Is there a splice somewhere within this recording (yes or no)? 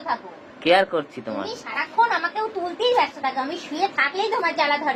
no